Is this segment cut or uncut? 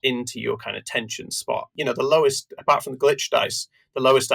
cut